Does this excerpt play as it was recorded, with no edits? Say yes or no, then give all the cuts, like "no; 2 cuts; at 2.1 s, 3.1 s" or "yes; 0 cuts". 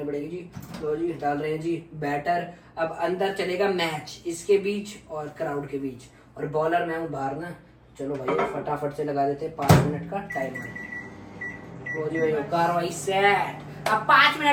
yes; 0 cuts